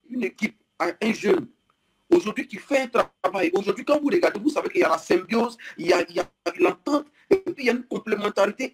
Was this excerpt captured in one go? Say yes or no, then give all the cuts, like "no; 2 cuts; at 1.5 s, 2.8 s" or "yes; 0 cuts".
yes; 0 cuts